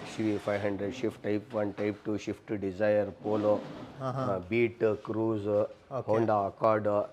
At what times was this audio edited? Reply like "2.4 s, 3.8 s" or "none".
none